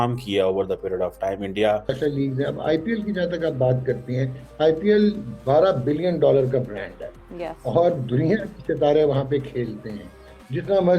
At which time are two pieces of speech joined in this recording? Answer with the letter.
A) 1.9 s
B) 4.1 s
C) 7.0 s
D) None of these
A